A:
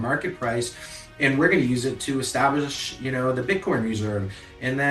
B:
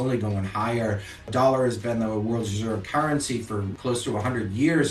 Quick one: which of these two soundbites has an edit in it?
B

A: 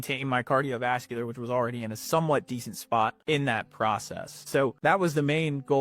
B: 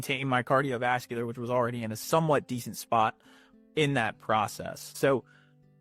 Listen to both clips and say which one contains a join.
A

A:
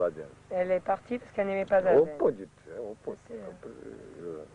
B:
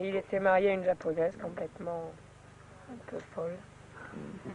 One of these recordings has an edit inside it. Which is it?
B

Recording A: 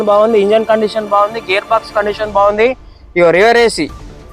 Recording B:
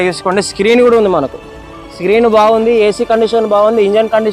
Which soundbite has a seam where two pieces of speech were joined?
A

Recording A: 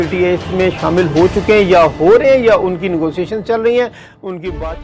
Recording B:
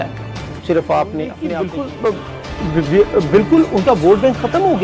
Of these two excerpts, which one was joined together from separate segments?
B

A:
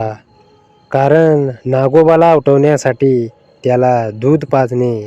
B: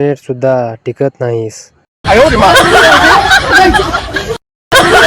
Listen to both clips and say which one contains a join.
B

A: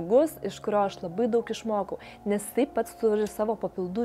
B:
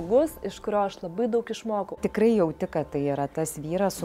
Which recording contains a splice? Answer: B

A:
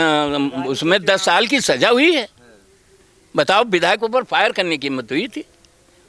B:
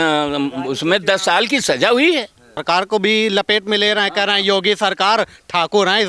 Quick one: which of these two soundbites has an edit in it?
B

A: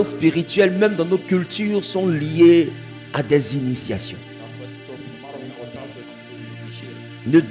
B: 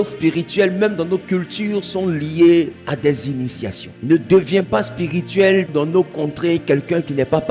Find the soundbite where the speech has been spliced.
B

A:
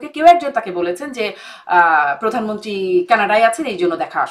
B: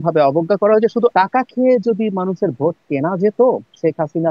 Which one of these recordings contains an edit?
B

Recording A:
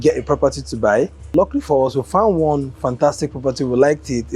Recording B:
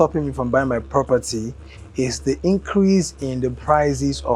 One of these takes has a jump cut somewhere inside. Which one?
A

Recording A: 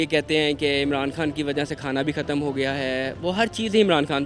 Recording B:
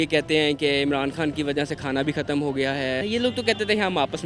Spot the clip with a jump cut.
B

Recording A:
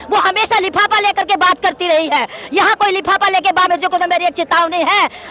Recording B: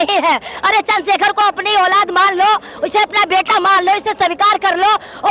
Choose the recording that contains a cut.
A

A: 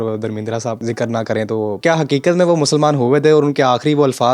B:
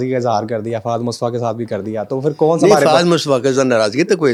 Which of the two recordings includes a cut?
A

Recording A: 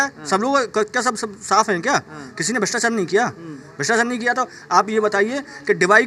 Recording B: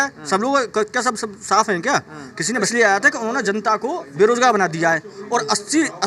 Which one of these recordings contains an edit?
B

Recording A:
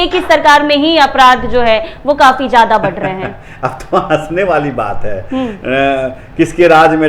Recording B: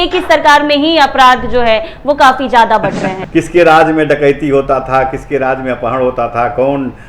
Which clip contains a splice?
B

